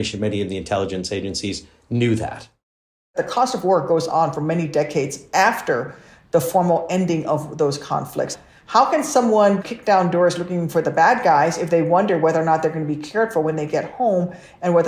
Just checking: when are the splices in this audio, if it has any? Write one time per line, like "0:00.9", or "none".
0:03.1
0:08.3
0:09.6